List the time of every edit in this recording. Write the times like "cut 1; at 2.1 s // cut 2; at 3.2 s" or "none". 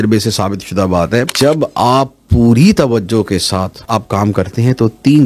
cut 1; at 1.3 s // cut 2; at 3.8 s